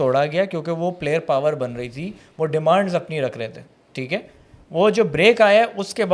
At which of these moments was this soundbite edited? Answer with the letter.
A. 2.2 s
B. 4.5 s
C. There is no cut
C